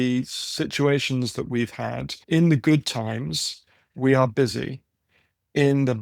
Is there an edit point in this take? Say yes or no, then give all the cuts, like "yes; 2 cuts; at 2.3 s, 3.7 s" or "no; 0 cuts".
yes; 1 cut; at 2.2 s